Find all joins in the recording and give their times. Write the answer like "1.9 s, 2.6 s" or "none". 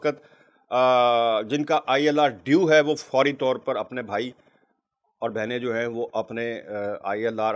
none